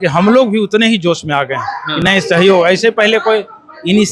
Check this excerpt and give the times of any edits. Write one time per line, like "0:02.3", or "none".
none